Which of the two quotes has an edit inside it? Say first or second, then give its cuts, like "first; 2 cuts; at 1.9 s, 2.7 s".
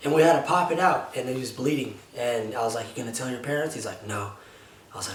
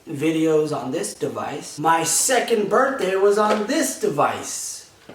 second; 1 cut; at 1.6 s